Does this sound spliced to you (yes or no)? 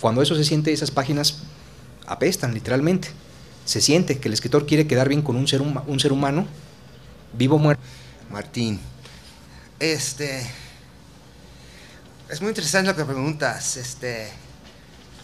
no